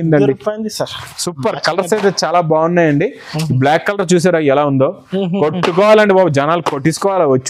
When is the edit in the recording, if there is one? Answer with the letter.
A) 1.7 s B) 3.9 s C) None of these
C